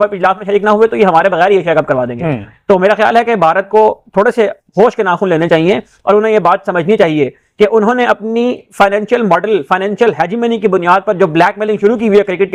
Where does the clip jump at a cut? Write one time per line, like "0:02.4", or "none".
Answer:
none